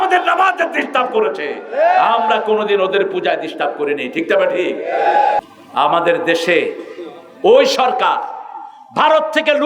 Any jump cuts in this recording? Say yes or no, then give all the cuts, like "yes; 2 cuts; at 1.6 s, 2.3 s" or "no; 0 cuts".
yes; 1 cut; at 5.4 s